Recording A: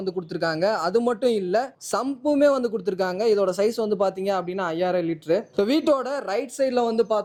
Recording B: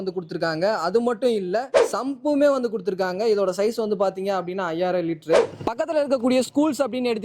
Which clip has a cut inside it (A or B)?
B